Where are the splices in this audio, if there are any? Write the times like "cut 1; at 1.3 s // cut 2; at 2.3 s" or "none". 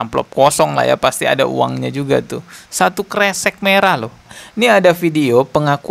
cut 1; at 4.3 s